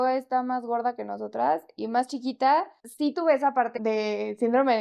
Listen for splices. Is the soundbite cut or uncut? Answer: cut